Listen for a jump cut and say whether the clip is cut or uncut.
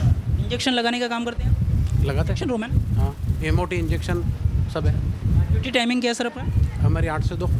uncut